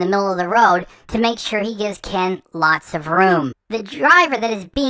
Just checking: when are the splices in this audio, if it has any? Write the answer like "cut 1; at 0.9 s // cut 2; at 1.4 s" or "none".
cut 1; at 3.6 s